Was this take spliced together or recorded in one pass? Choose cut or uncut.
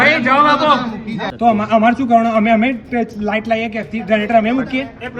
cut